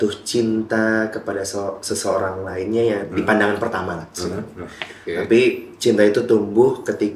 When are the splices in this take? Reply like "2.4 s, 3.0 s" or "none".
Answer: none